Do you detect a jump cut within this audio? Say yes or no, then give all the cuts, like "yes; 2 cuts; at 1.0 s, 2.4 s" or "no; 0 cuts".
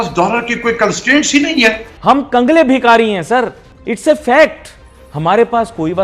yes; 1 cut; at 1.9 s